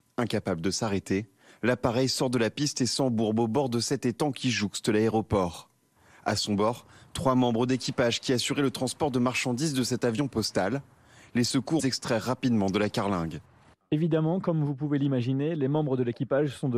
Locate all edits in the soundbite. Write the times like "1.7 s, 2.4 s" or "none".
11.8 s

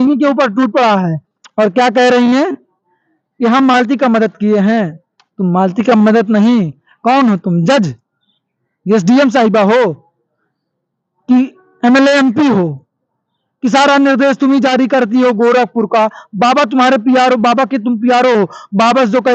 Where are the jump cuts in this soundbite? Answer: none

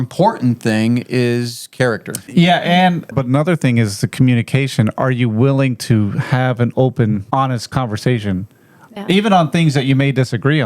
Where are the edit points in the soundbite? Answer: 2.2 s, 3.1 s, 7.7 s

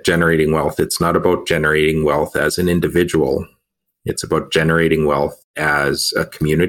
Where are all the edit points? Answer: none

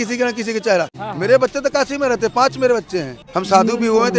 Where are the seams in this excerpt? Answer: 1.0 s, 3.2 s

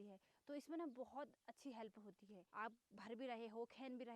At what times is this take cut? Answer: 2.4 s

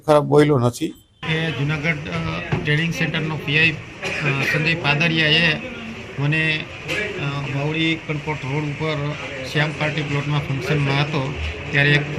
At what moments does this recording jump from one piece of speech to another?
3.9 s

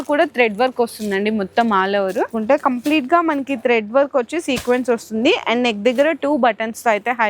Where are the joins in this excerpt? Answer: 2.3 s

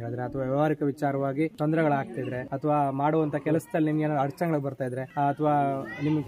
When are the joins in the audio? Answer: 1.5 s, 2.4 s, 5.0 s

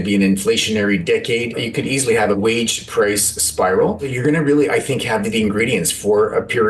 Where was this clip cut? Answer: 1.8 s, 4.1 s

